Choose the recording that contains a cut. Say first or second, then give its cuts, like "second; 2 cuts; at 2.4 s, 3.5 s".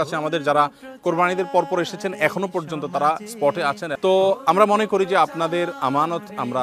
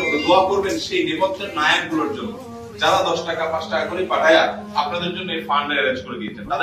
first; 1 cut; at 3.9 s